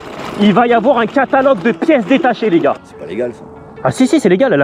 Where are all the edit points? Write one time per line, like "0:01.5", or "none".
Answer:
0:02.8